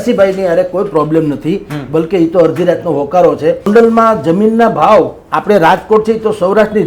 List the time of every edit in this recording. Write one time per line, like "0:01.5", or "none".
0:03.7